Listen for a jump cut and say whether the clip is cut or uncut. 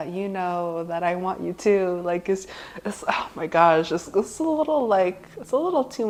uncut